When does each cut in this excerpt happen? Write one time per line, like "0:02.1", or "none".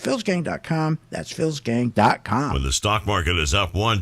0:02.6